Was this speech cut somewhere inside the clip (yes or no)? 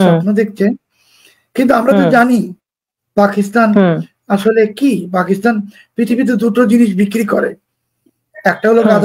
no